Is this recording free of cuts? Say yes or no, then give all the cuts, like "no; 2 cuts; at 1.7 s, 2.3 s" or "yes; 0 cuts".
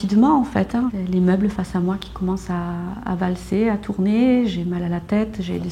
no; 1 cut; at 0.9 s